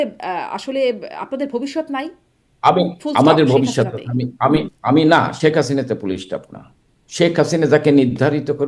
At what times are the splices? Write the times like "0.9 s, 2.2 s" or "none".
none